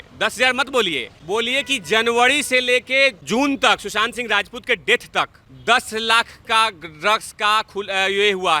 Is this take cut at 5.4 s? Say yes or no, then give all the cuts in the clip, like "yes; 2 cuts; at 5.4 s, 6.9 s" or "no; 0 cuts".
yes; 3 cuts; at 1.1 s, 3.2 s, 5.4 s